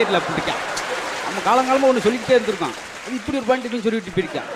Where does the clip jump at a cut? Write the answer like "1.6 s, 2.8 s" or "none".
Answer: none